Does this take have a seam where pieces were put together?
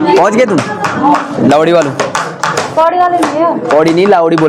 no; 0 cuts

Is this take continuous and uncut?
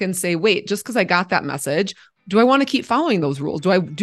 no; 1 cut; at 2.0 s

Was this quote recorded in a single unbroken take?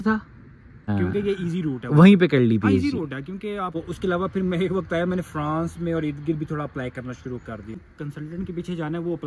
no; 3 cuts; at 0.9 s, 3.8 s, 7.9 s

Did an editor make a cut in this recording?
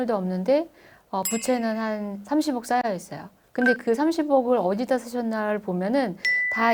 no; 0 cuts

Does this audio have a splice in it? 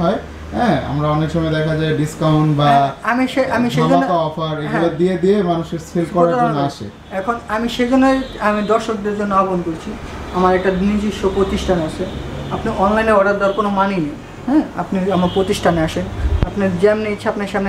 no; 0 cuts

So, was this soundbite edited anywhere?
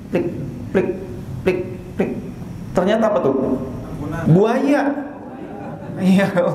yes; 1 cut; at 4.1 s

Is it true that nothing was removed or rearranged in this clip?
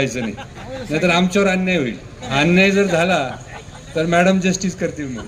no; 1 cut; at 2.2 s

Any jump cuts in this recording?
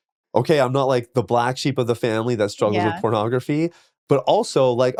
no; 0 cuts

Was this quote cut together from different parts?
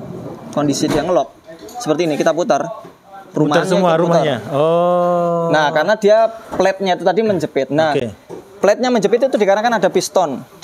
no; 0 cuts

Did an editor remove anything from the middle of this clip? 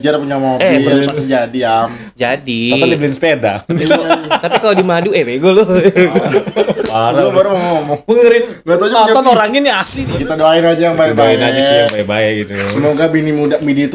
yes; 1 cut; at 10.1 s

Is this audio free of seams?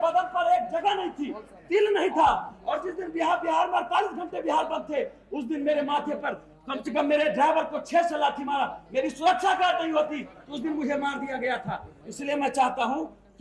yes; 0 cuts

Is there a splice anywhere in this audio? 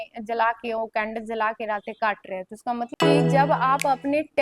yes; 1 cut; at 2.9 s

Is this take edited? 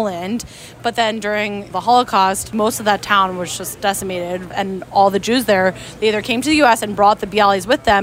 yes; 3 cuts; at 1.7 s, 2.5 s, 4.5 s

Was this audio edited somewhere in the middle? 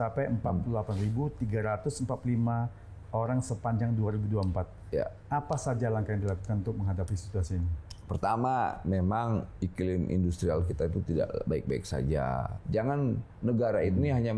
yes; 1 cut; at 12.6 s

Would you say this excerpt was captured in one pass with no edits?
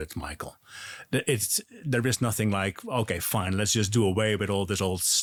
yes; 0 cuts

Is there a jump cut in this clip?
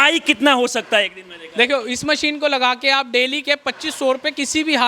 no; 0 cuts

